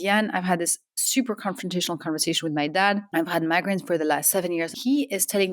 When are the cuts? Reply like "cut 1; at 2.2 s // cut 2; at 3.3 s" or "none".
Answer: cut 1; at 3.0 s // cut 2; at 4.7 s